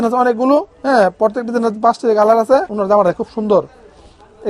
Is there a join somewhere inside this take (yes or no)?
yes